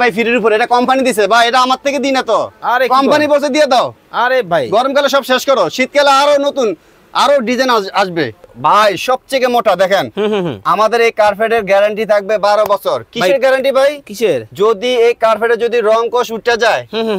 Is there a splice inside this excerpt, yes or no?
yes